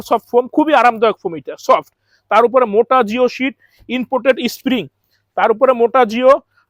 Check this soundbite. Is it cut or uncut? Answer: uncut